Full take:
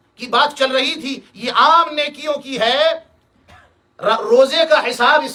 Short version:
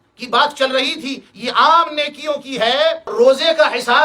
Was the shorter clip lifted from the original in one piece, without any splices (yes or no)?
no